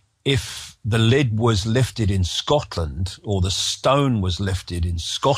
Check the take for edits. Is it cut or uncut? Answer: uncut